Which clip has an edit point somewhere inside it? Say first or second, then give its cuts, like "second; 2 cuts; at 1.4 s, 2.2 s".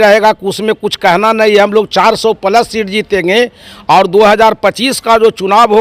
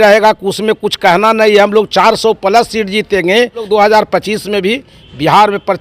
second; 1 cut; at 3.6 s